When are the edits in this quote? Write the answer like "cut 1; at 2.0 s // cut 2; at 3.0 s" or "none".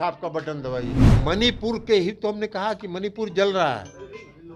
cut 1; at 1.0 s